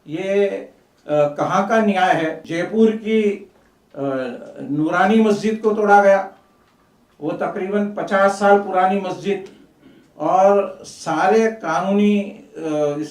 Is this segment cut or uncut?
cut